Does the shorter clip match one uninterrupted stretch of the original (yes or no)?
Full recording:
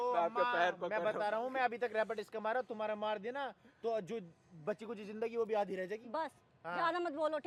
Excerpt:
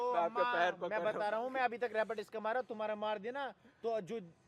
yes